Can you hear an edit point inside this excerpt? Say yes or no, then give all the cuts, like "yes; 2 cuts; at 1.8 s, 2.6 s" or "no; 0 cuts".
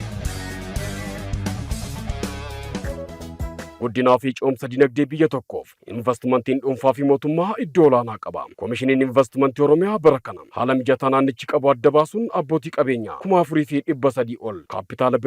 yes; 1 cut; at 2.9 s